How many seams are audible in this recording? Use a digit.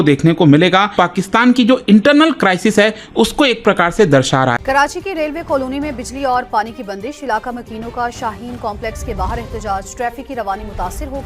2